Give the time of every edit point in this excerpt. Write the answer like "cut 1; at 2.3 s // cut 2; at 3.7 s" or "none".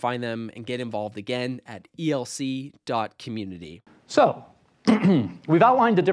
none